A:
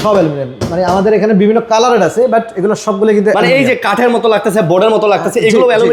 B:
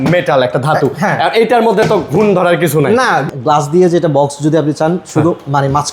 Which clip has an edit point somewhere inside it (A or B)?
B